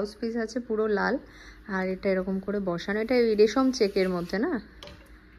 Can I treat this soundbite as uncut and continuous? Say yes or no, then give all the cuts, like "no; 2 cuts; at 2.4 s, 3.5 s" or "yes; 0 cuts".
yes; 0 cuts